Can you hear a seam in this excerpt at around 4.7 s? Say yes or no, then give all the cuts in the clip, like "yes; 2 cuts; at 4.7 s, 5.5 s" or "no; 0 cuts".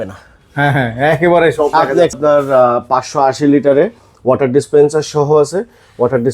no; 1 cut; at 2.2 s